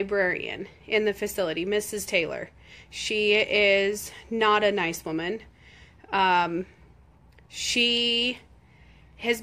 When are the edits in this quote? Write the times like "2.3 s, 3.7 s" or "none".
5.1 s